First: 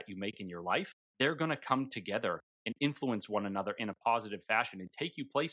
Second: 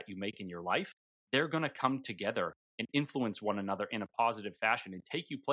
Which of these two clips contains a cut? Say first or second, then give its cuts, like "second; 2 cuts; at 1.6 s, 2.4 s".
first; 1 cut; at 1.0 s